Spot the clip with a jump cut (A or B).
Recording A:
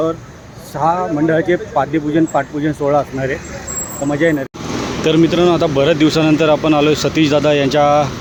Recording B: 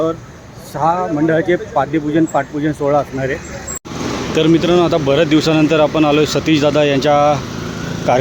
B